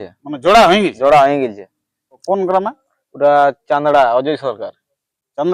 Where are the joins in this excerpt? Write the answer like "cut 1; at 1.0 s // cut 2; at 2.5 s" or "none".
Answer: cut 1; at 2.2 s